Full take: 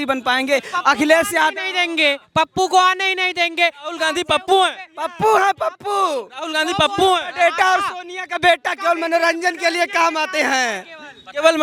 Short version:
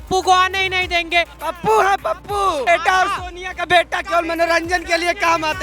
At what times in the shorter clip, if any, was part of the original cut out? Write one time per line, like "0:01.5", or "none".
0:01.4
0:02.6